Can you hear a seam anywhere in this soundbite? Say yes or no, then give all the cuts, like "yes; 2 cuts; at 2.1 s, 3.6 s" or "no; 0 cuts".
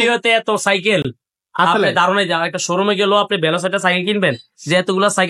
no; 0 cuts